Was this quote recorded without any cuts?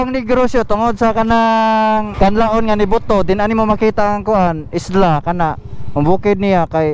no; 1 cut; at 2.1 s

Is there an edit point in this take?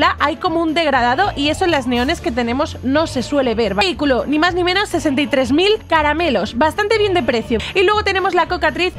yes; 3 cuts; at 3.8 s, 5.8 s, 7.6 s

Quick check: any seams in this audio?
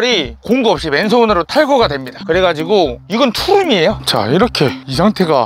yes; 1 cut; at 4.0 s

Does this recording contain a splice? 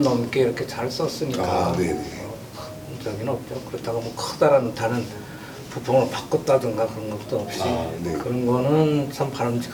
no; 0 cuts

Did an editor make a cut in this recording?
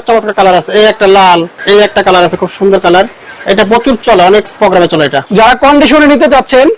yes; 2 cuts; at 1.6 s, 5.2 s

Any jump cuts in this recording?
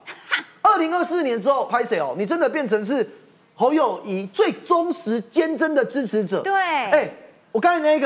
no; 0 cuts

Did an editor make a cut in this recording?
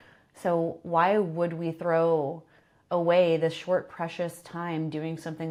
no; 0 cuts

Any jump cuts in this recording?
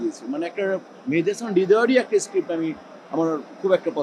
no; 0 cuts

